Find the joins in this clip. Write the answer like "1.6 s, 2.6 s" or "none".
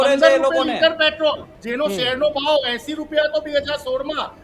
1.5 s